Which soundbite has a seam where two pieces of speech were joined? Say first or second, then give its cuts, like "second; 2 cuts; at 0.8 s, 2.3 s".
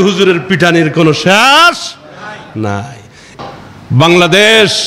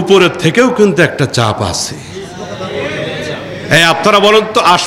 first; 1 cut; at 3.4 s